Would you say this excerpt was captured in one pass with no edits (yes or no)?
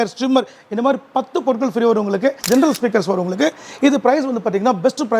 no